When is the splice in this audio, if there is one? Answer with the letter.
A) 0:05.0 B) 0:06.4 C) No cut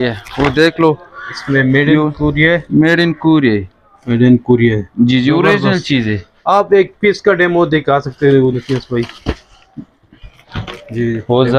C